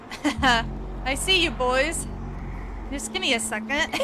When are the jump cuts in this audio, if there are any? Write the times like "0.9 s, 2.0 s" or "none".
none